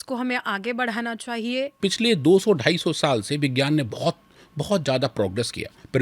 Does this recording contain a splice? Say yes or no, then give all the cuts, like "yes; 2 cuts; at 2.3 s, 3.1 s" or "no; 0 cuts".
yes; 1 cut; at 1.8 s